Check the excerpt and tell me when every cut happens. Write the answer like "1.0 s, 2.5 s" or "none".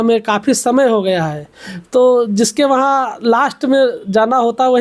none